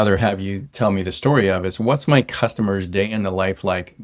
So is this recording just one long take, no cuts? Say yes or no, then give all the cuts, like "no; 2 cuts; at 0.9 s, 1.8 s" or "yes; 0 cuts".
yes; 0 cuts